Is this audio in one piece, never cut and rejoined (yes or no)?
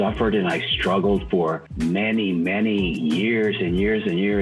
yes